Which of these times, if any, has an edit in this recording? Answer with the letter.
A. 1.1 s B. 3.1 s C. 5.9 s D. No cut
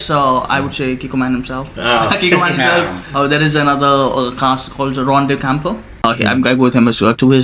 C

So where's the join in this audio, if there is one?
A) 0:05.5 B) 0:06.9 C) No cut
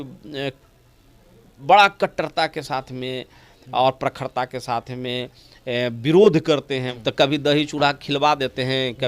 B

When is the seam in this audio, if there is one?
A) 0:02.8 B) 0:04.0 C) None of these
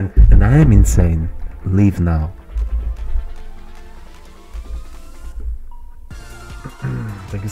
C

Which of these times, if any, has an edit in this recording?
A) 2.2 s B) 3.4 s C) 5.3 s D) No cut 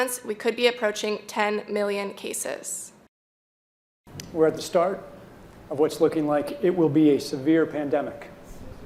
B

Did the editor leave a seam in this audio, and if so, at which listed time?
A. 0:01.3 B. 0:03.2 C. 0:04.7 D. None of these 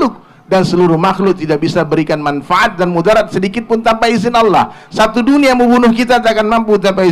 D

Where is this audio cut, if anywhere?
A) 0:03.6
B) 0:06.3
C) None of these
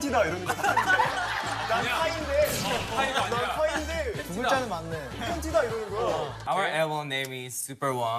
B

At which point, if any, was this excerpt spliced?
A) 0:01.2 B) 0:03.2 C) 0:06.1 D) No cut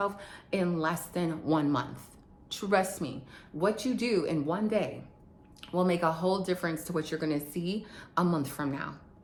D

